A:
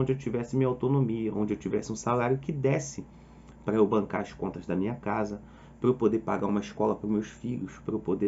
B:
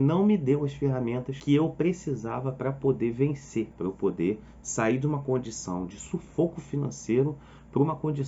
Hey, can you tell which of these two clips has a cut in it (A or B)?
B